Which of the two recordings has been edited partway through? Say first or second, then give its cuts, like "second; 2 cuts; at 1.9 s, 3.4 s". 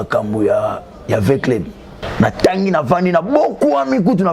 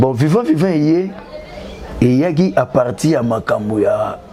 first; 1 cut; at 2.0 s